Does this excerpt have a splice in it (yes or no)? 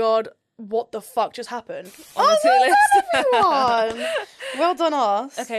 yes